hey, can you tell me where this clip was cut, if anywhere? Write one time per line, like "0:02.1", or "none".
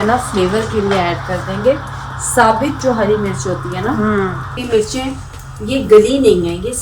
0:04.6